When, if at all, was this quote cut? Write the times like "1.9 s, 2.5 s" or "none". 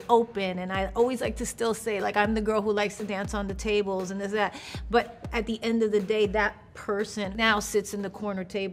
7.3 s

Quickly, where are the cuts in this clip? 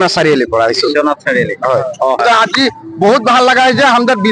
none

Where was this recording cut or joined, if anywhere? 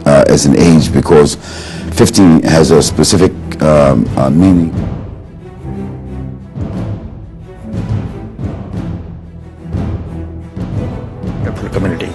none

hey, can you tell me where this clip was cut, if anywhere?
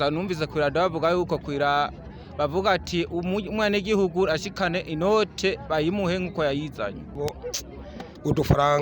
7.2 s

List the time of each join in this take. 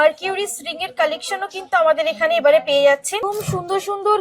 3.2 s

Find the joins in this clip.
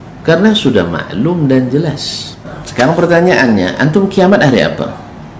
2.6 s

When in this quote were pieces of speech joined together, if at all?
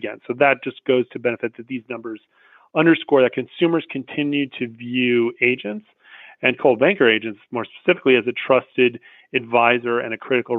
none

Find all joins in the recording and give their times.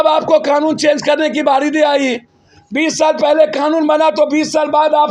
none

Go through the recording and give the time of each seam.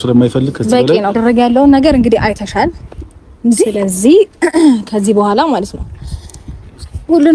1.2 s

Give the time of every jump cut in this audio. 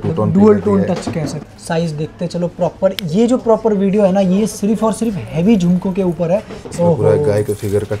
1.4 s, 6.6 s

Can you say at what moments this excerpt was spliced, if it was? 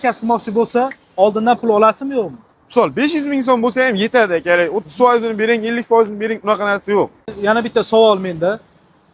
7.3 s

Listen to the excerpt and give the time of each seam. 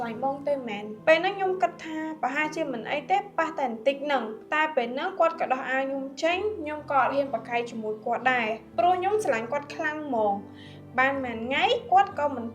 0.9 s, 4.4 s

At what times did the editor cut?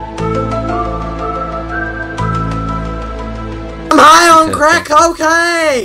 3.8 s

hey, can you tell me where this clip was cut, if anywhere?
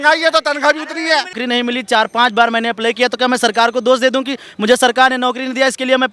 1.4 s

